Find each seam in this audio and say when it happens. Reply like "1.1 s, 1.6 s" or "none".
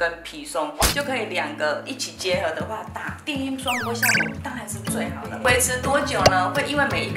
5.4 s